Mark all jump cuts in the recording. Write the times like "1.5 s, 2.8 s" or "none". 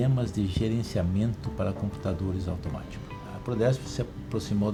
none